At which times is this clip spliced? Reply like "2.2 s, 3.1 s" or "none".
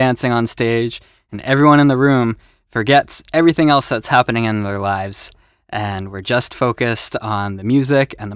none